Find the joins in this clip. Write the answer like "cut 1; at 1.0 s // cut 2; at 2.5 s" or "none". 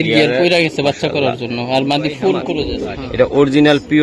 cut 1; at 2.2 s